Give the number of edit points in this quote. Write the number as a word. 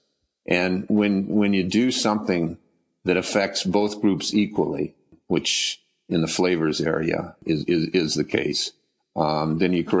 two